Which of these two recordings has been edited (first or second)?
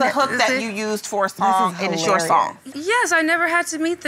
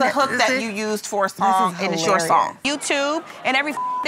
second